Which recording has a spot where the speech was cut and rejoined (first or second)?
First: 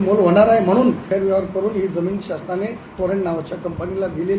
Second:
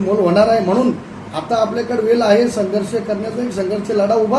first